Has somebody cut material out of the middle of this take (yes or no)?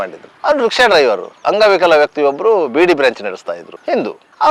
no